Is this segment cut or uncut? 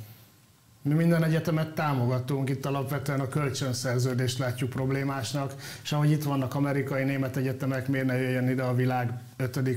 uncut